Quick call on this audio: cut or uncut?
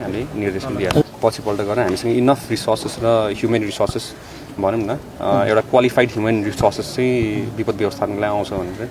cut